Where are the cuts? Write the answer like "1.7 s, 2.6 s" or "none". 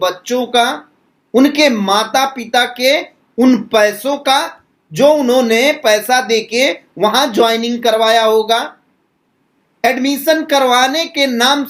none